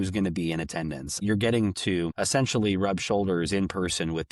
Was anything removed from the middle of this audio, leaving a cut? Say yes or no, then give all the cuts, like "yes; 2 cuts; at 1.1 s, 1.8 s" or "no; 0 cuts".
yes; 2 cuts; at 1.2 s, 2.2 s